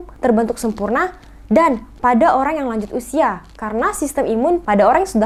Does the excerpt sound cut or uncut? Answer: uncut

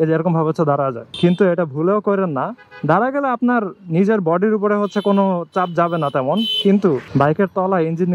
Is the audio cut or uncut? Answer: cut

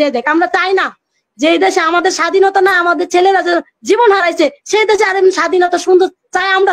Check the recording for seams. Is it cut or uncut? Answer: uncut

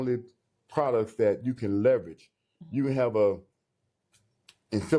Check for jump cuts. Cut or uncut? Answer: uncut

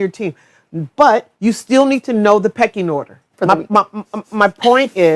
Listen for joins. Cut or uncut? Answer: cut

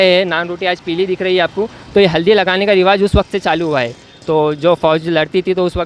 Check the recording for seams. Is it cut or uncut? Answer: uncut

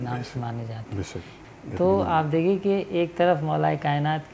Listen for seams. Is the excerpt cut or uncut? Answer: cut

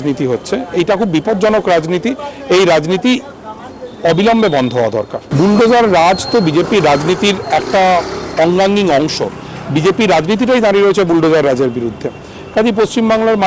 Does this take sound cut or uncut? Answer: uncut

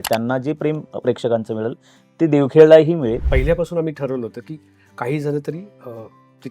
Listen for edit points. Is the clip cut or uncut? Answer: cut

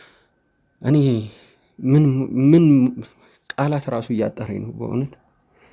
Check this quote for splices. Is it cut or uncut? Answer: uncut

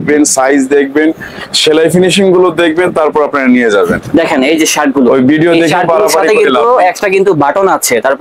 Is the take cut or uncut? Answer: uncut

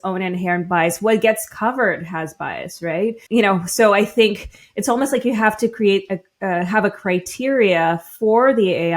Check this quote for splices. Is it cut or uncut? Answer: cut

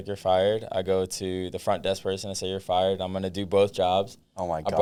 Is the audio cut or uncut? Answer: uncut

